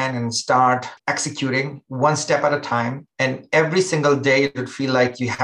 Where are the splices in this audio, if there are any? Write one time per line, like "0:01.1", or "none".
0:01.0
0:03.0